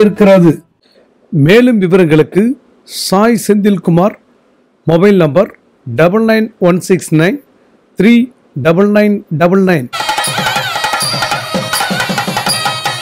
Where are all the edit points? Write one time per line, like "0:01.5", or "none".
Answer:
0:09.9